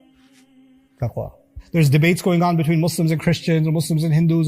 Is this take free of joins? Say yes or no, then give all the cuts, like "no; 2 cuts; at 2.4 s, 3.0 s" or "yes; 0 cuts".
no; 1 cut; at 1.6 s